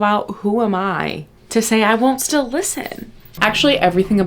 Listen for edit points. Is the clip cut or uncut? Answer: cut